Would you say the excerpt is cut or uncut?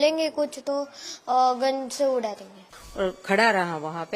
cut